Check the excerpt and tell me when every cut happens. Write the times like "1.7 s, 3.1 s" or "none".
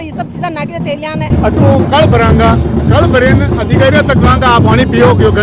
1.3 s